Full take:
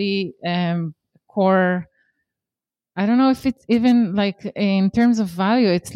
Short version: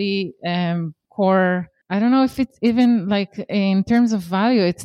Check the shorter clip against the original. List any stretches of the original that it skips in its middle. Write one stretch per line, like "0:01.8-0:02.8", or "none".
0:01.0-0:01.2
0:01.9-0:02.8